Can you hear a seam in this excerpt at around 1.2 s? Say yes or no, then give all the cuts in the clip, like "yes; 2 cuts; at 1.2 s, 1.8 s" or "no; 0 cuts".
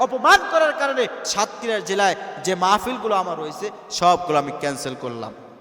yes; 1 cut; at 1.2 s